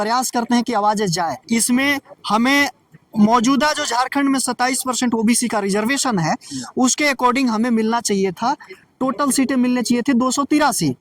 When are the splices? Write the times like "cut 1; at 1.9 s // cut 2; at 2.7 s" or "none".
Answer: cut 1; at 1.4 s